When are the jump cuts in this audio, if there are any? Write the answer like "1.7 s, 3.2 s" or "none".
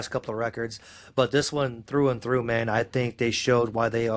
none